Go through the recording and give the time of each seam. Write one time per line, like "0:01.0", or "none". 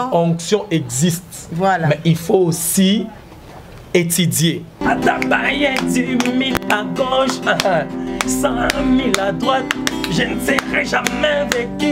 0:04.8

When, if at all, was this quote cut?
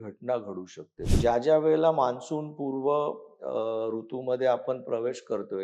0:01.0

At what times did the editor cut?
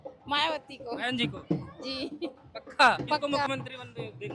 0:03.2

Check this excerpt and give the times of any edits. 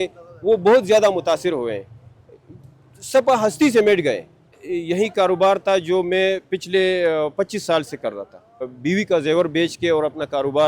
0:04.7
0:08.7

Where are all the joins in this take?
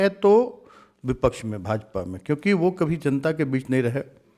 none

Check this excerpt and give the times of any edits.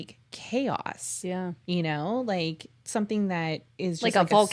none

